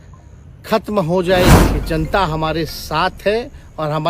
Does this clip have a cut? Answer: yes; 1 cut; at 1.7 s

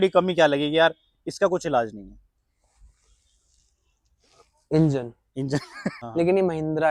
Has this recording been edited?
yes; 1 cut; at 5.9 s

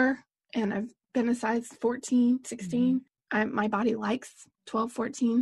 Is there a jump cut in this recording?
yes; 2 cuts; at 1.0 s, 3.2 s

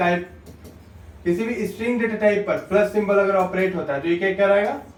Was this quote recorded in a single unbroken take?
yes; 0 cuts

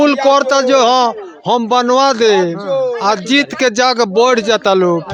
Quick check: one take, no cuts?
yes; 0 cuts

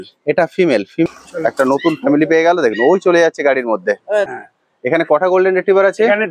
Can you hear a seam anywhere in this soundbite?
yes; 2 cuts; at 1.1 s, 4.3 s

